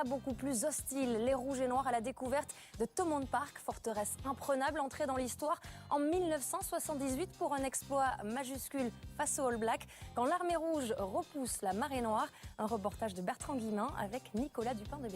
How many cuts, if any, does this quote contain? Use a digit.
1